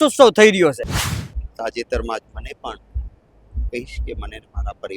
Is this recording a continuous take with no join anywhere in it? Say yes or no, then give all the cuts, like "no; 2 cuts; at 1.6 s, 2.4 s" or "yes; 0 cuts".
no; 1 cut; at 0.9 s